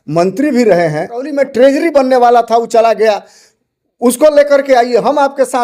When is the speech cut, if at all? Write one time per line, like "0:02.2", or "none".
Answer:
0:01.3